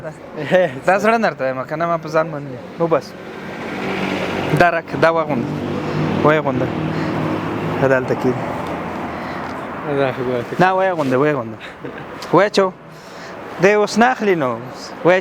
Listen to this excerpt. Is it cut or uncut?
uncut